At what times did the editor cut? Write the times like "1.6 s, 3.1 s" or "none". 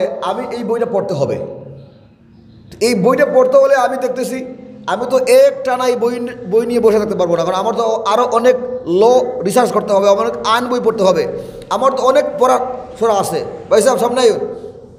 none